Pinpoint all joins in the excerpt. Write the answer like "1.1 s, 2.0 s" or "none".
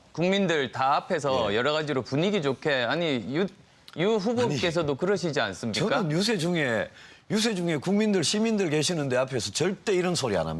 1.2 s